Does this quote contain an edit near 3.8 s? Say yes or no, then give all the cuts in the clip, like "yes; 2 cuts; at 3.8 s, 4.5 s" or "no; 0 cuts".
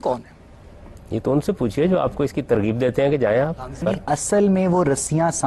yes; 1 cut; at 3.8 s